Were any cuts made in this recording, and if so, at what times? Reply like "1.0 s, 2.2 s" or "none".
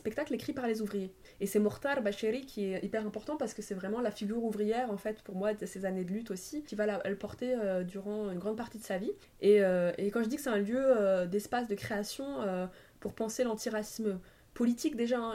1.2 s, 6.7 s, 9.3 s